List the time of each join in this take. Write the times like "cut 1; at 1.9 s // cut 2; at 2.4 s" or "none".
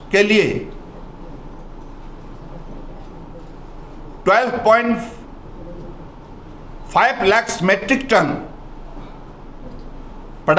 none